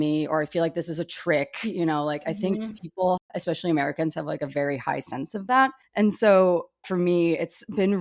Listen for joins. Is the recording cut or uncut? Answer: uncut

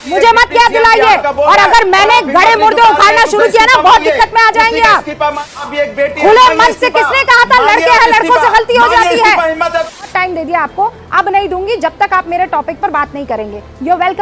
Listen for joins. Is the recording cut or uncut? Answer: cut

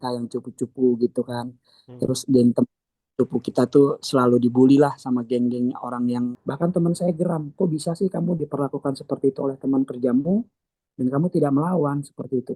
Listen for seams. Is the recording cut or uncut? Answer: cut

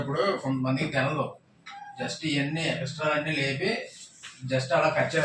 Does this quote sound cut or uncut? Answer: uncut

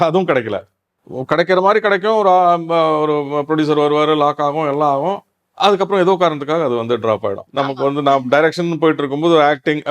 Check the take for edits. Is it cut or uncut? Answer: cut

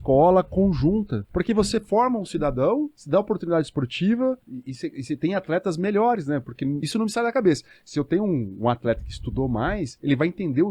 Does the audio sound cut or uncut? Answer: cut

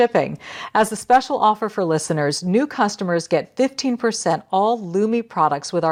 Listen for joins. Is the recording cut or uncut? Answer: uncut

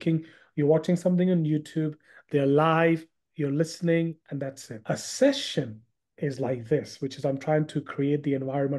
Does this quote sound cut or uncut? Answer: cut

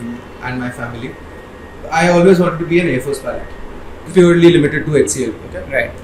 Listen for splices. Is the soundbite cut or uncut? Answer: cut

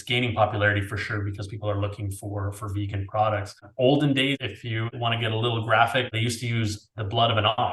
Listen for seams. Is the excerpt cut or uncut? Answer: cut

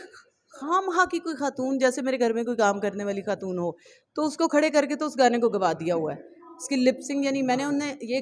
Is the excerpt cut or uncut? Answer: uncut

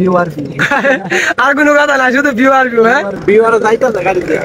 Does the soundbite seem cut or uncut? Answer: cut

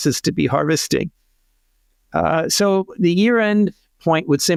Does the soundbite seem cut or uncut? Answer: uncut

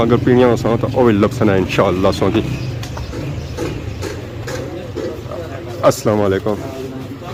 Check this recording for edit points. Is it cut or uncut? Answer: uncut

